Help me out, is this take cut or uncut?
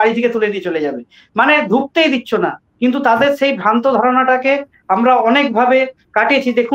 uncut